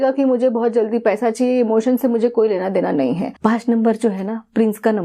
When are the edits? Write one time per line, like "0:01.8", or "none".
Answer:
0:03.3

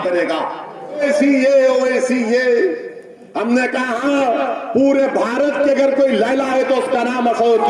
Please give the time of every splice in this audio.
0:01.0

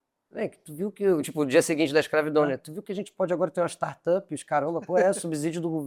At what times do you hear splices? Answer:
none

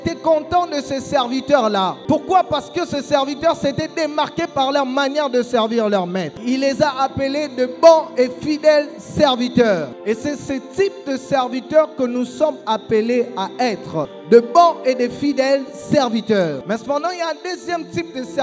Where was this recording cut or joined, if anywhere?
0:02.0
0:06.4
0:09.9
0:14.0
0:16.6

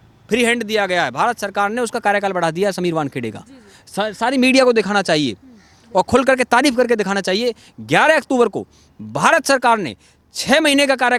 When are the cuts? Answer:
none

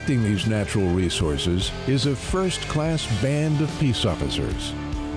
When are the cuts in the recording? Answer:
none

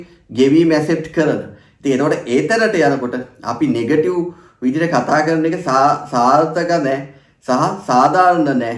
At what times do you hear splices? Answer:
none

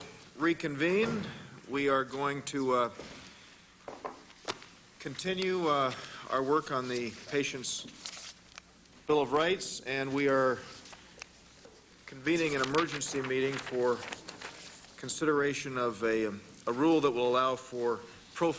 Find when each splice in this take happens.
0:06.2

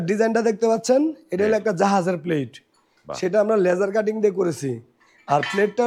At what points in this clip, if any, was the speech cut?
none

